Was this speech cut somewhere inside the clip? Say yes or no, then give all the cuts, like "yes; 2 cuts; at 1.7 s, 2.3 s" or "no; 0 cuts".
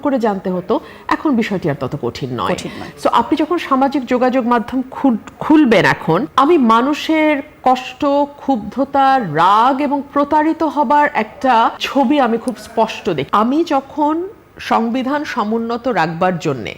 yes; 3 cuts; at 6.3 s, 11.8 s, 13.2 s